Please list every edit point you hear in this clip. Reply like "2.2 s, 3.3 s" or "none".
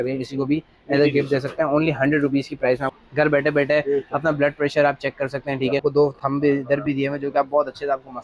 2.9 s, 5.8 s

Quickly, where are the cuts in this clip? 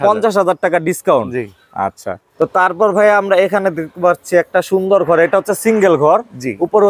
none

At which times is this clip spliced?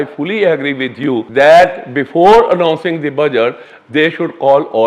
1.3 s

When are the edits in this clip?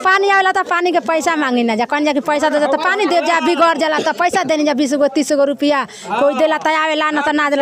none

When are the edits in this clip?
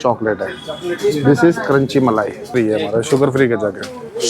2.5 s

